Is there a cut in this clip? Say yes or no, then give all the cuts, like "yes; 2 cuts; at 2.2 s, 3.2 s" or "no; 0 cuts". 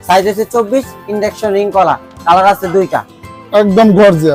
no; 0 cuts